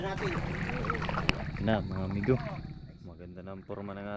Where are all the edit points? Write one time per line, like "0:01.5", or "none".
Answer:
0:01.0

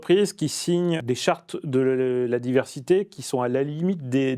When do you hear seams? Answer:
0:01.0

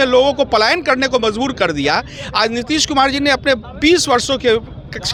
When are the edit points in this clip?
none

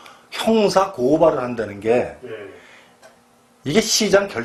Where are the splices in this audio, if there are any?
none

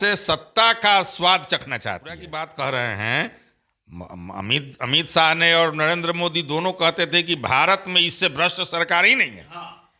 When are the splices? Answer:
0:02.3

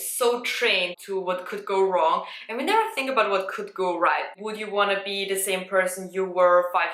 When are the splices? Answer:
0:01.0
0:04.4

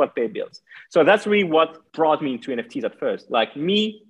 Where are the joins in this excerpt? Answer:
0:01.8

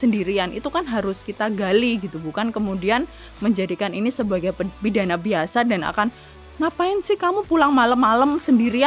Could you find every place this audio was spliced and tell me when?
none

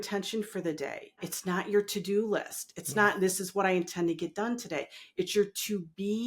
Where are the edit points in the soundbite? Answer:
0:01.3

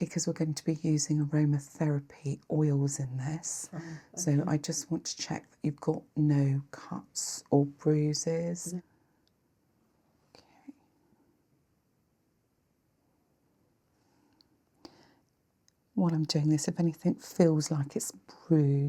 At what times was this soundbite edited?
0:08.8

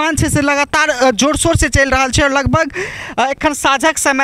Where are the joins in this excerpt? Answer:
none

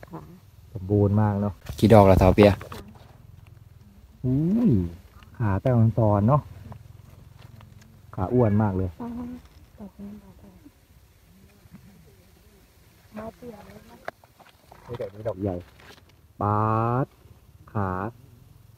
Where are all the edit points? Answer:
0:01.6

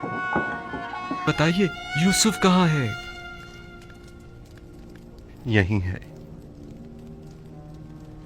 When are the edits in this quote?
0:01.3

